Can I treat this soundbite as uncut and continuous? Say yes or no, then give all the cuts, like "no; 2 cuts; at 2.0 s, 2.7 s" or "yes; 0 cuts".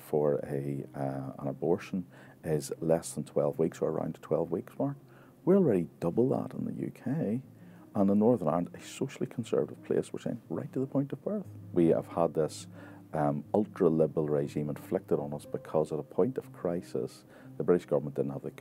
no; 1 cut; at 11.7 s